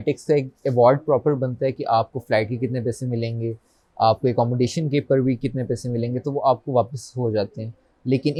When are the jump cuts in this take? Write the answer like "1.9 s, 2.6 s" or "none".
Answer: none